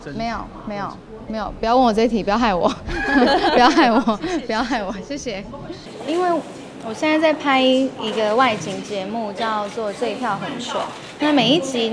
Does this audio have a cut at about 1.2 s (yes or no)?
no